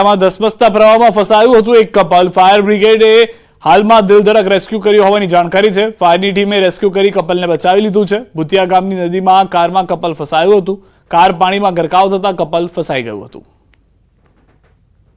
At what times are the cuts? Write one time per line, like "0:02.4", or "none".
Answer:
none